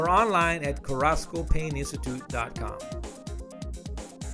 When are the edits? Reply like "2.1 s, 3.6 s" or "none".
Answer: 2.5 s